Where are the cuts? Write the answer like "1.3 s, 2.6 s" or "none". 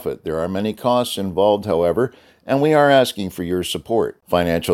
none